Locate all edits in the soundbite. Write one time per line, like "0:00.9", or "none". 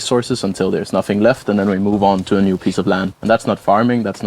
0:03.1